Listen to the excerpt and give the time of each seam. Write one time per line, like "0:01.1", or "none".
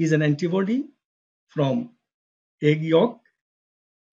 none